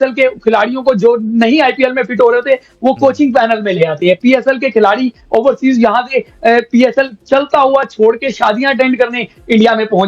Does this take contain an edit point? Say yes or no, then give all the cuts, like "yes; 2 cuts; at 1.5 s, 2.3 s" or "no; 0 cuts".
no; 0 cuts